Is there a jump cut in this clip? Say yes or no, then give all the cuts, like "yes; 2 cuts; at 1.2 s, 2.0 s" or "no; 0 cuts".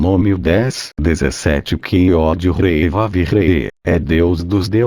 yes; 1 cut; at 1.8 s